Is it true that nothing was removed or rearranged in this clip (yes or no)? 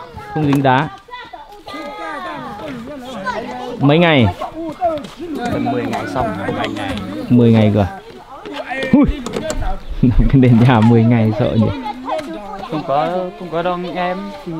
yes